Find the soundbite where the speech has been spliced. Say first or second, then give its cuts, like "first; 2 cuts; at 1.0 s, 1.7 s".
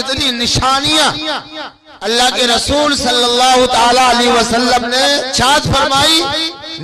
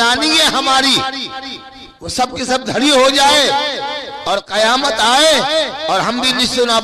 first; 1 cut; at 5.3 s